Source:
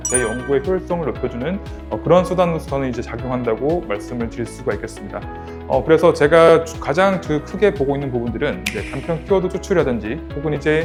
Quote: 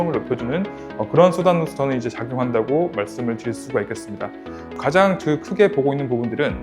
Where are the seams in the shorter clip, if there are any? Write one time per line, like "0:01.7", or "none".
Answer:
0:04.7